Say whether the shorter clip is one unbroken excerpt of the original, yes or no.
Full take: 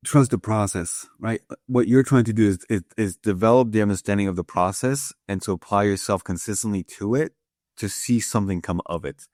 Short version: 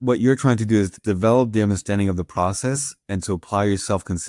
no